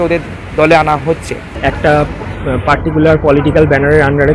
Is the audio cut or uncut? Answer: cut